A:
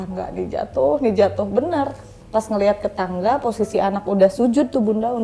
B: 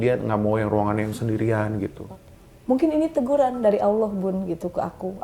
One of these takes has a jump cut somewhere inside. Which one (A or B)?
B